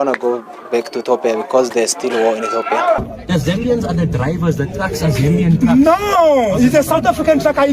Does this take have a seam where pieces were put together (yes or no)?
yes